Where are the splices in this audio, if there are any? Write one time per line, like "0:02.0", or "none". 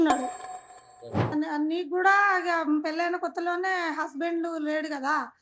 0:01.3